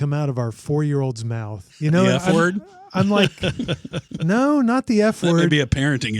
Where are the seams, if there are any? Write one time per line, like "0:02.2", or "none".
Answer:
0:01.6